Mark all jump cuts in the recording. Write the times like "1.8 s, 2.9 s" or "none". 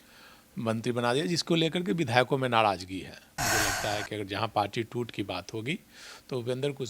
3.4 s